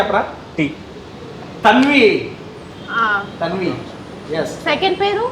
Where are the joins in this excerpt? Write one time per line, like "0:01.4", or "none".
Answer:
none

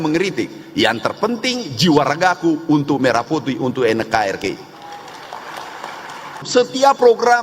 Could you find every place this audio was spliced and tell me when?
0:06.4

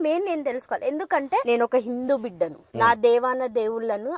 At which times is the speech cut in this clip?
0:01.4
0:02.6

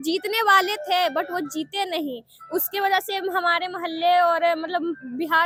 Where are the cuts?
none

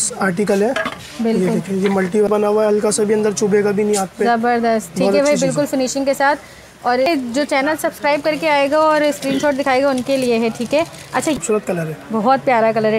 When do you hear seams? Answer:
0:02.3
0:07.1
0:11.4

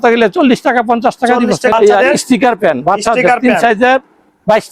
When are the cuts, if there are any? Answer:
0:01.7

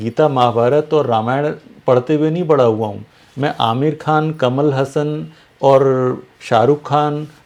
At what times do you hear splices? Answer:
none

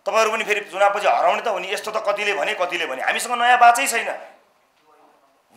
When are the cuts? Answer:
none

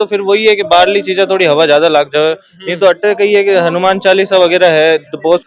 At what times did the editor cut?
none

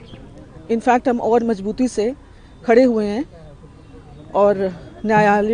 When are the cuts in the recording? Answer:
none

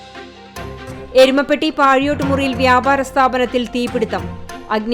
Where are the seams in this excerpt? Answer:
0:00.9

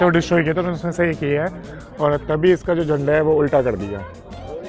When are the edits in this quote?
none

